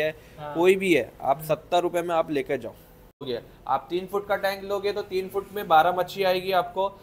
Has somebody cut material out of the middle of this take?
yes; 1 cut; at 3.2 s

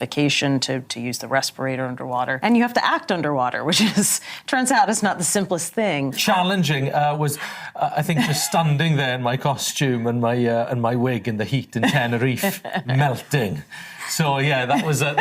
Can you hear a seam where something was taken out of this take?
yes; 1 cut; at 6.2 s

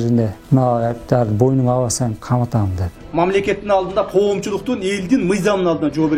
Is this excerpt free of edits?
no; 1 cut; at 2.9 s

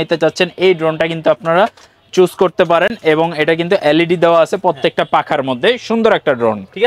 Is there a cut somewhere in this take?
no; 0 cuts

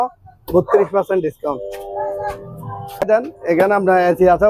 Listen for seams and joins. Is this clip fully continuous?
yes; 0 cuts

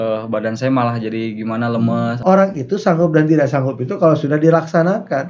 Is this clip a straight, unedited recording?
no; 1 cut; at 2.2 s

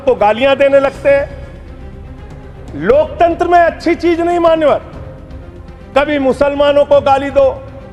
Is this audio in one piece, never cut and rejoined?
yes; 0 cuts

